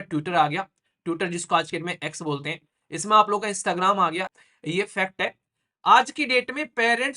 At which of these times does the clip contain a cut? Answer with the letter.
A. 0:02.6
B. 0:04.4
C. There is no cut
B